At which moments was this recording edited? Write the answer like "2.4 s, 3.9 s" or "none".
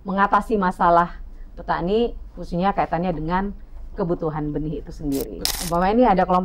5.5 s